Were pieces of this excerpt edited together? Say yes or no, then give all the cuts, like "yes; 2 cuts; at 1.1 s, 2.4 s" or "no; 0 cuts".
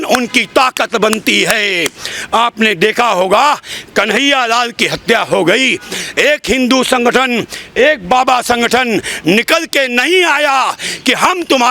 no; 0 cuts